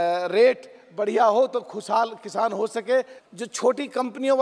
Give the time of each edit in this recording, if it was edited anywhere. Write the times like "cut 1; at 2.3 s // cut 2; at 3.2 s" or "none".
cut 1; at 3.2 s